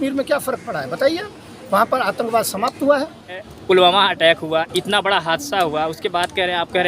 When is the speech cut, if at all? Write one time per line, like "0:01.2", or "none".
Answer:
0:03.3

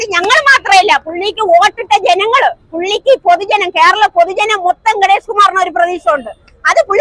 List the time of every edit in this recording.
none

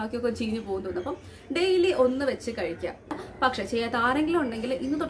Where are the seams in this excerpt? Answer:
0:03.2

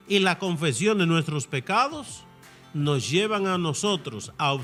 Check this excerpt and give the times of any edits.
none

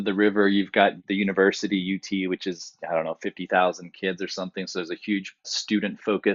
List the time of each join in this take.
0:01.0

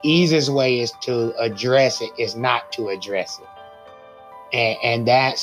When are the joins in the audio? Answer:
0:00.9

